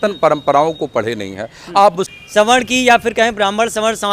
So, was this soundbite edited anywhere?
yes; 1 cut; at 2.1 s

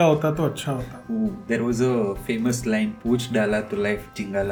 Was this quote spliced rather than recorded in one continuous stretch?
no; 0 cuts

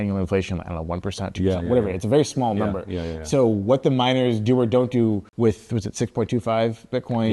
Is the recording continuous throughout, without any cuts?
no; 1 cut; at 5.3 s

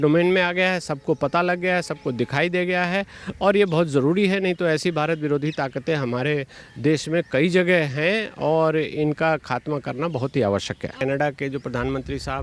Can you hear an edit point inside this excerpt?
yes; 1 cut; at 10.9 s

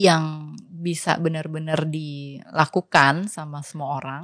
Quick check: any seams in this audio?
no; 0 cuts

